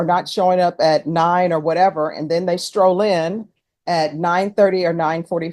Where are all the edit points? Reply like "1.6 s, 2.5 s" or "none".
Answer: none